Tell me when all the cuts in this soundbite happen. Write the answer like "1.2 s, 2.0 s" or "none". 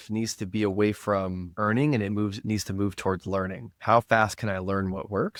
none